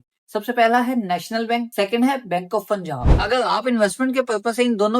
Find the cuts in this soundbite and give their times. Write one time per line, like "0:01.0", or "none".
0:03.1